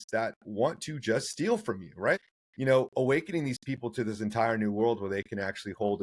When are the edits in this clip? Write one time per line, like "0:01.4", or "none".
0:02.2